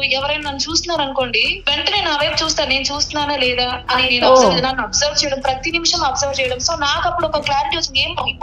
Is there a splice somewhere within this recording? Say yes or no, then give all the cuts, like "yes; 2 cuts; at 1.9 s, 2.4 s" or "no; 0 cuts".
yes; 1 cut; at 1.5 s